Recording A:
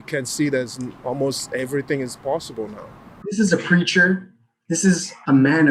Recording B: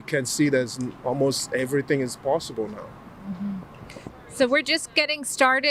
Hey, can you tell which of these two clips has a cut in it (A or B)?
A